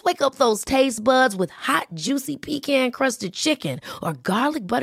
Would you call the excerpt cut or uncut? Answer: uncut